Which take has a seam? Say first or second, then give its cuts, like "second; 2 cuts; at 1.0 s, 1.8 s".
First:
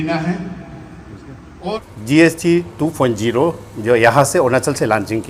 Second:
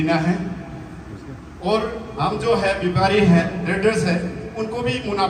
first; 1 cut; at 1.5 s